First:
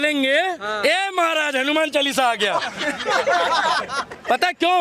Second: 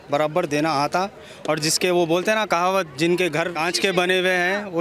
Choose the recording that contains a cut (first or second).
second